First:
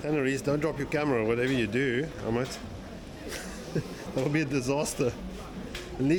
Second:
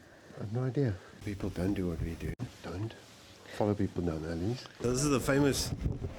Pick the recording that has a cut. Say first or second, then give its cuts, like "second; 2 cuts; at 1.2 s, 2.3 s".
second; 2 cuts; at 1.1 s, 4.7 s